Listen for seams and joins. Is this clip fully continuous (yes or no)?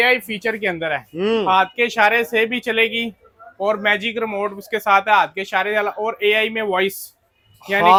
yes